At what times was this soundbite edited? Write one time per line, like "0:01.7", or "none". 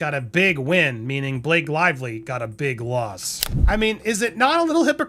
0:03.4